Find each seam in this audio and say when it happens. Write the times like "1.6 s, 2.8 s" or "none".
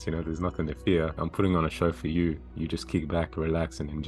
1.1 s, 2.5 s

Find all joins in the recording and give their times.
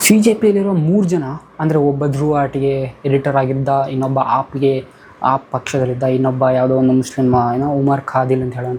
none

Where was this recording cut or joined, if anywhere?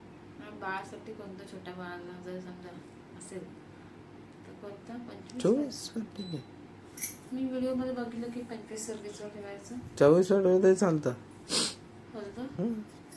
none

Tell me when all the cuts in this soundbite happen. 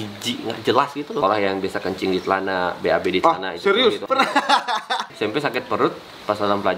1.2 s, 4.0 s, 5.1 s

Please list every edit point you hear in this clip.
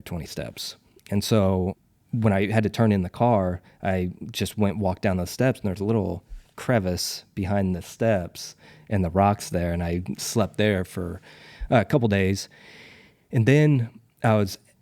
1.8 s

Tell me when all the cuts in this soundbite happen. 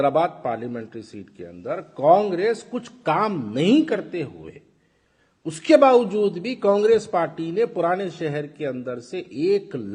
none

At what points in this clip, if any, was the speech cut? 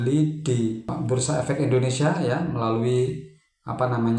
0.9 s

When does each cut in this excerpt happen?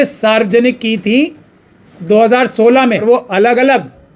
3.0 s

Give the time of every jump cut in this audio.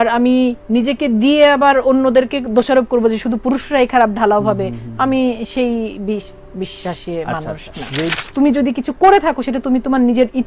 8.1 s

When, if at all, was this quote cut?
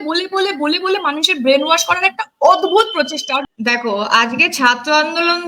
3.3 s

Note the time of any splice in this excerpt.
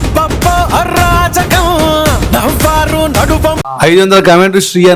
3.7 s

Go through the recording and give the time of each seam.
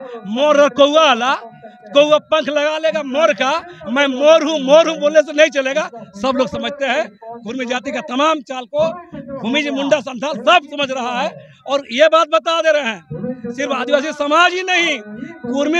none

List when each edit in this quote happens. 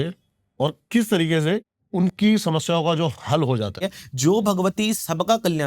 1.8 s, 3.8 s

